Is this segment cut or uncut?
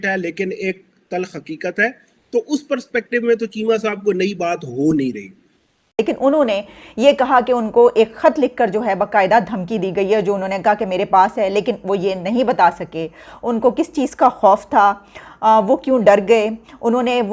cut